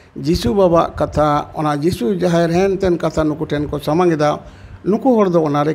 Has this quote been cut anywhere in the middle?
no; 0 cuts

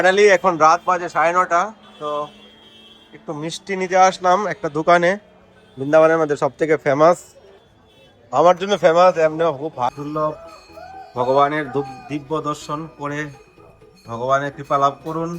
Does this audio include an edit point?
yes; 1 cut; at 9.9 s

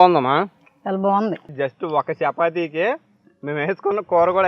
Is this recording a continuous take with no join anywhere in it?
no; 1 cut; at 1.4 s

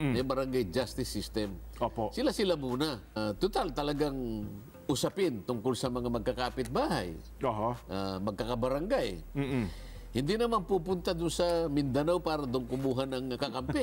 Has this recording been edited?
yes; 1 cut; at 3.2 s

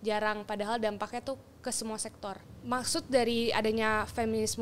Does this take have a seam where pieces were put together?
yes; 1 cut; at 2.5 s

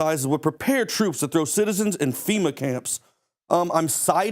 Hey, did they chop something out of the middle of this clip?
yes; 1 cut; at 1.7 s

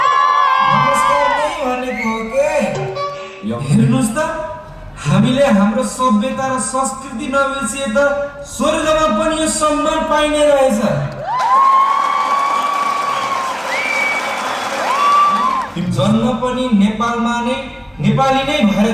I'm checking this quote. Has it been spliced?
yes; 2 cuts; at 3.3 s, 15.7 s

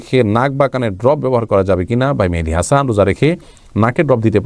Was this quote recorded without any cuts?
yes; 0 cuts

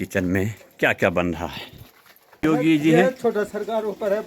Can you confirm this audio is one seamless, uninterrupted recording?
no; 1 cut; at 2.4 s

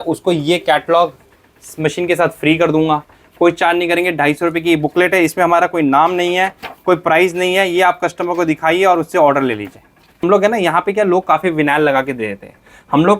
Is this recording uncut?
no; 1 cut; at 10.2 s

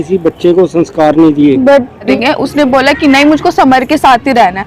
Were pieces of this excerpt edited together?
yes; 1 cut; at 2.1 s

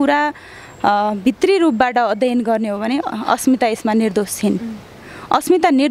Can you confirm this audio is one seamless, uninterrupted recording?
yes; 0 cuts

